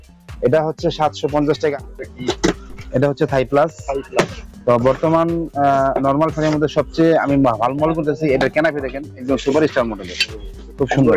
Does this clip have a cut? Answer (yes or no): yes